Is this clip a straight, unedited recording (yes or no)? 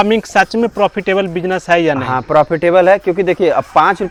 yes